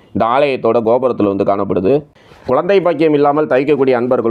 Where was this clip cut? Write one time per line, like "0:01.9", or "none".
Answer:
0:02.1